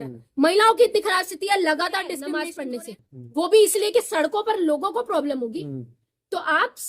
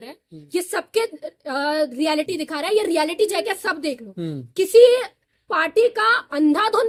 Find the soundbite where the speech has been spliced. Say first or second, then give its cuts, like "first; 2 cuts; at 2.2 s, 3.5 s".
first; 1 cut; at 2.5 s